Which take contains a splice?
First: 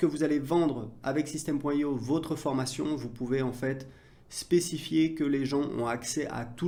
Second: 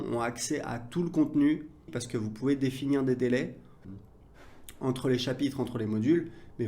second; 2 cuts; at 2.0 s, 3.8 s

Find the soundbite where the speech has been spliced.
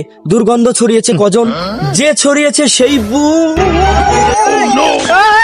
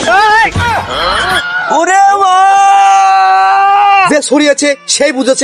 second; 1 cut; at 4.1 s

